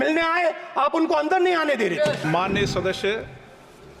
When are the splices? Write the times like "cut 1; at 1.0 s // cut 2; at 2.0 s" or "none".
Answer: cut 1; at 2.2 s